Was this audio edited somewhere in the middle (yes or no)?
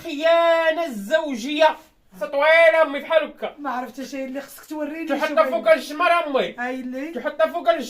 yes